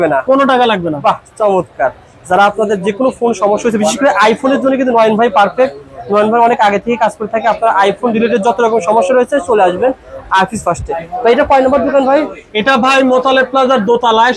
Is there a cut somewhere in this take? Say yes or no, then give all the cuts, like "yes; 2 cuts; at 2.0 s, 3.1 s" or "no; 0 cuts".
no; 0 cuts